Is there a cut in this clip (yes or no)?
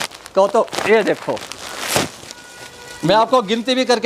no